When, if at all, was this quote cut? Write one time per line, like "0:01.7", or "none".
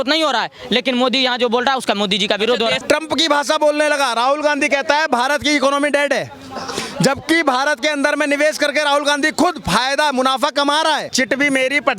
0:02.8
0:11.1